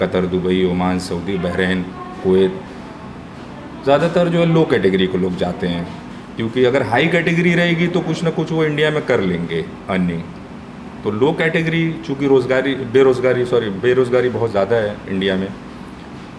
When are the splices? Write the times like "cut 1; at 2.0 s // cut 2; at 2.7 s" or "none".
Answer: none